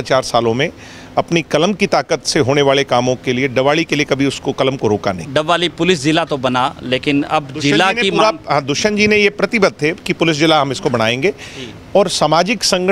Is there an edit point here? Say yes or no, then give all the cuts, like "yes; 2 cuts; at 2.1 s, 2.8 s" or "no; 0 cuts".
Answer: yes; 1 cut; at 5.3 s